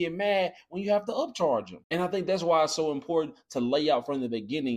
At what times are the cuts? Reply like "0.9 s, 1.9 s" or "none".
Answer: 1.8 s